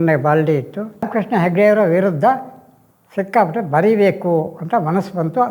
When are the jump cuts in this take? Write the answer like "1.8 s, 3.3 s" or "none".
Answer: 1.0 s